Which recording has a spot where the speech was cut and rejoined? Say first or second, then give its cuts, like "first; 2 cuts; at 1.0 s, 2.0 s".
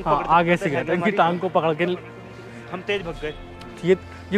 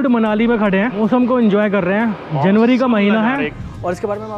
second; 2 cuts; at 1.0 s, 3.6 s